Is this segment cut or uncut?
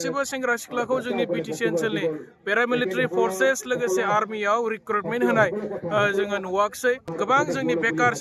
cut